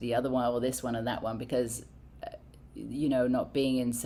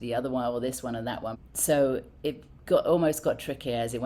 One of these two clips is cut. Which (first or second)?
second